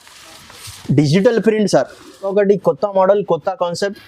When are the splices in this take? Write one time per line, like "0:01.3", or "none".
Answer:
0:02.3